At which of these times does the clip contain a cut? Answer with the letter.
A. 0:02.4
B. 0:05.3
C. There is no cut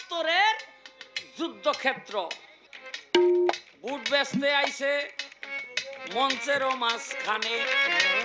A